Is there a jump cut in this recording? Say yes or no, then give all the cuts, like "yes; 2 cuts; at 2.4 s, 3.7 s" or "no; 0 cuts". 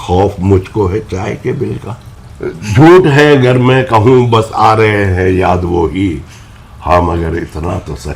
yes; 1 cut; at 2.7 s